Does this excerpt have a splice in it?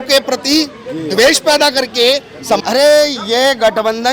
yes; 1 cut; at 2.6 s

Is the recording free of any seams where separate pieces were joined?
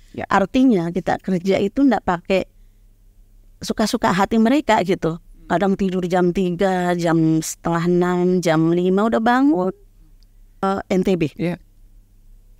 no; 1 cut; at 10.6 s

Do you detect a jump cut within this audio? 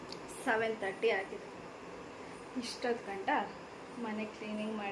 no; 0 cuts

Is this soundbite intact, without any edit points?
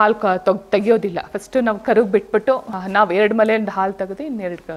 no; 1 cut; at 2.8 s

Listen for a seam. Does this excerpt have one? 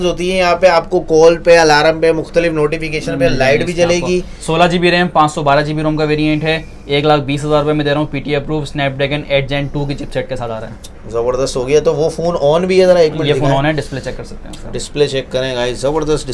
no; 0 cuts

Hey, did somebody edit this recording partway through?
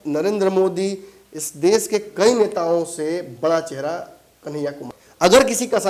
yes; 1 cut; at 4.9 s

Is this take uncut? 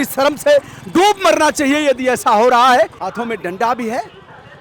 no; 1 cut; at 3.0 s

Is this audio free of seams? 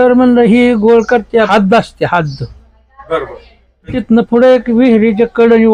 no; 2 cuts; at 1.5 s, 4.0 s

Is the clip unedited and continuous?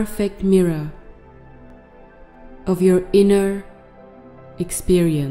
no; 2 cuts; at 1.0 s, 2.6 s

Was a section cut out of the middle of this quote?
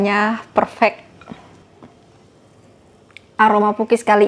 yes; 1 cut; at 1.6 s

